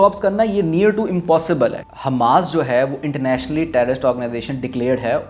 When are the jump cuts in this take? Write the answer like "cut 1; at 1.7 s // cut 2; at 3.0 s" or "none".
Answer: cut 1; at 1.9 s

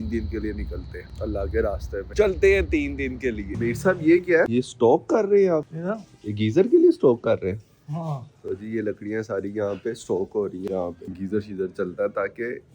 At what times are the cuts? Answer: cut 1; at 3.5 s

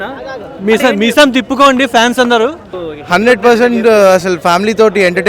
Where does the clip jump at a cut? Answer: cut 1; at 2.7 s

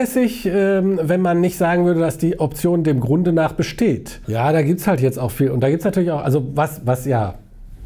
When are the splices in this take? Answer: cut 1; at 4.2 s

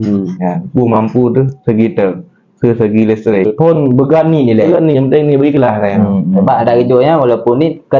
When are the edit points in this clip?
cut 1; at 3.4 s

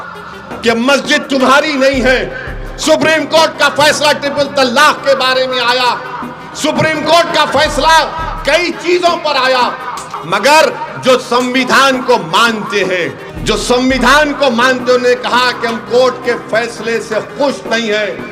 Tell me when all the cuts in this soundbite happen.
cut 1; at 10.1 s // cut 2; at 13.3 s

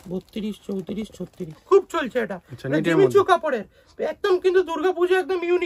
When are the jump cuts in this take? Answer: cut 1; at 1.6 s

